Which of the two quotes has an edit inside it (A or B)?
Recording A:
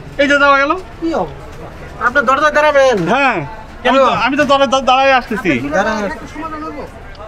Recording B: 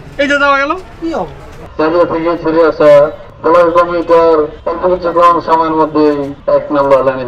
B